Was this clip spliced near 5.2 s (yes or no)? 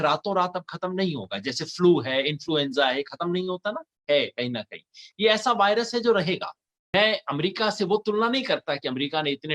no